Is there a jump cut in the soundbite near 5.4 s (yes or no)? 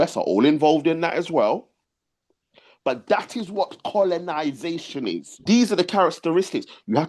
yes